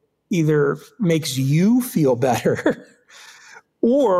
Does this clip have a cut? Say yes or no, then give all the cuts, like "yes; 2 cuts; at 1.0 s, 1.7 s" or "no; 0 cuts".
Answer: no; 0 cuts